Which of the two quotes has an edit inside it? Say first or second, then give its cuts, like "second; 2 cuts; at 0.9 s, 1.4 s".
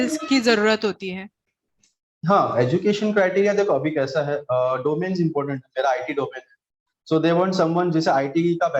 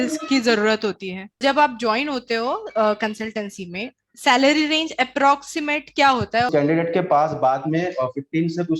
second; 2 cuts; at 1.4 s, 6.5 s